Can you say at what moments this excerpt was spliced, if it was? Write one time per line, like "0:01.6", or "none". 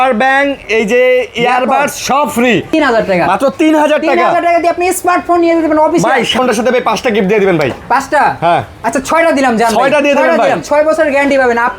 0:02.7
0:06.4
0:10.6